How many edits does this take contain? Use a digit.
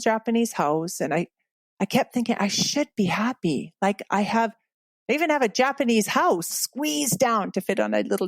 1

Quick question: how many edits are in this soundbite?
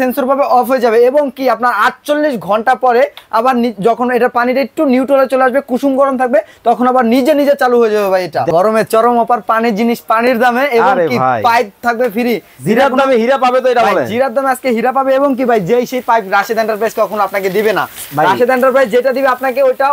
1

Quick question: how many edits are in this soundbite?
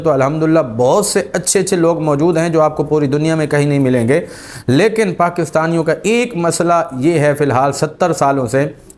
0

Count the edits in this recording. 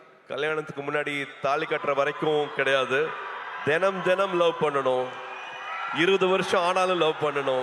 0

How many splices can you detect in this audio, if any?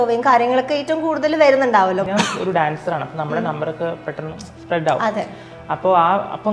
1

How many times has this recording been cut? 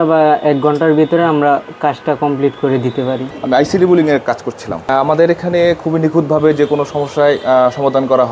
2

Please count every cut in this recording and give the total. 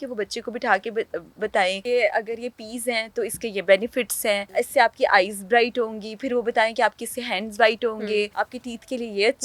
3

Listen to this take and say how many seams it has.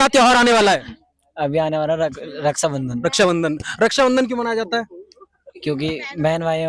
0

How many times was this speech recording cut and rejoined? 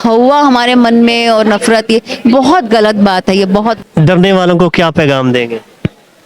1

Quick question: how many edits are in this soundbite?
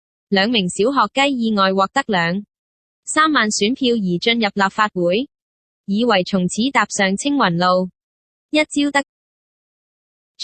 0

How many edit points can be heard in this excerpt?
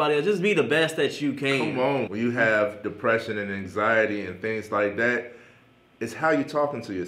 1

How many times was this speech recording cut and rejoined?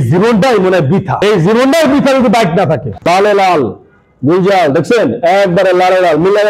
2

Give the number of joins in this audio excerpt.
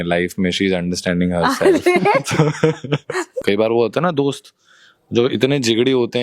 1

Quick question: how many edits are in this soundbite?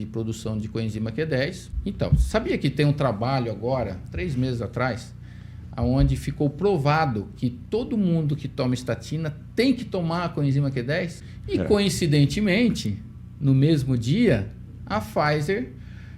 3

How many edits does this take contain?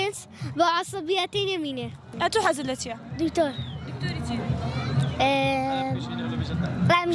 1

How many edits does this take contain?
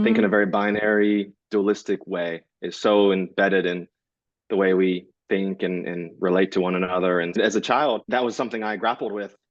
2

